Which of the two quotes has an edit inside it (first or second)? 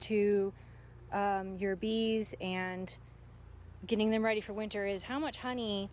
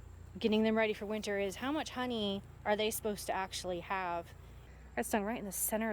second